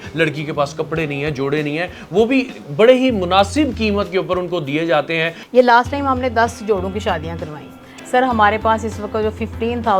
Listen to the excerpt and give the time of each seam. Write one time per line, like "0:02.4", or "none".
0:05.4
0:07.8